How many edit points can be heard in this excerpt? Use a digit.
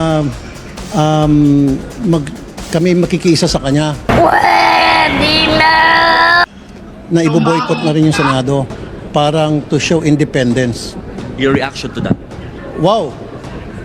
0